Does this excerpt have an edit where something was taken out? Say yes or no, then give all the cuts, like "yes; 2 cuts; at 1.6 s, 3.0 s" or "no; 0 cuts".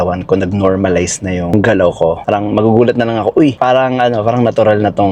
yes; 1 cut; at 2.2 s